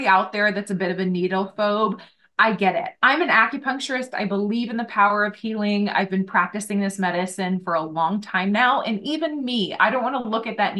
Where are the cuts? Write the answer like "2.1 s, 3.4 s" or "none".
none